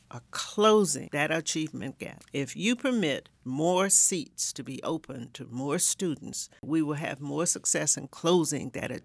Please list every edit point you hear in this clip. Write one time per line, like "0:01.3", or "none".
0:01.0
0:02.1
0:06.6